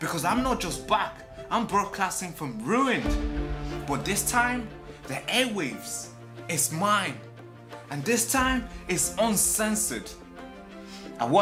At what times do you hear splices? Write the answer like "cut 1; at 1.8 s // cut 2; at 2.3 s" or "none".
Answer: none